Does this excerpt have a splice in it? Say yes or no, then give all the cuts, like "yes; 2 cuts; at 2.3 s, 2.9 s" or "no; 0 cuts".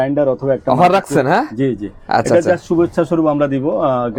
no; 0 cuts